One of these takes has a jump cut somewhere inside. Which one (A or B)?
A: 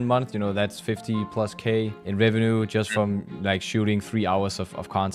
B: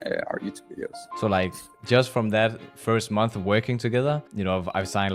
B